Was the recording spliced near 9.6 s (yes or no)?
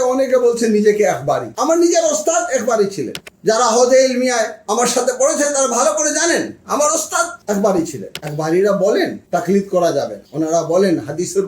no